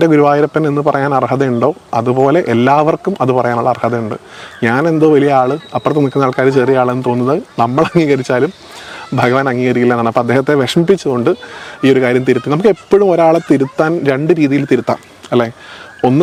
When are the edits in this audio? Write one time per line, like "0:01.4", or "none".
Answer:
none